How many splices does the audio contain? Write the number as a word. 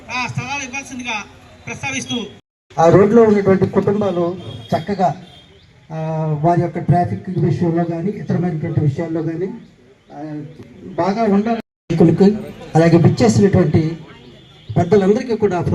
two